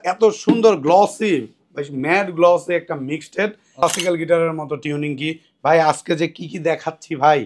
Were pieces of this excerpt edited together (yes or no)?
yes